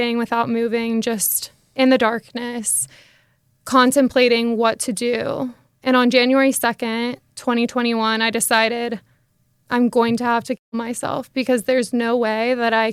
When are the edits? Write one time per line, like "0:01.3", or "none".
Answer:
none